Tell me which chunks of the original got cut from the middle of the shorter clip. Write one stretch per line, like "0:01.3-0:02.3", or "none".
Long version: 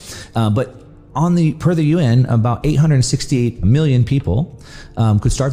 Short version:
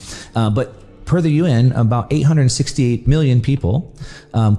0:01.0-0:01.6
0:03.6-0:03.7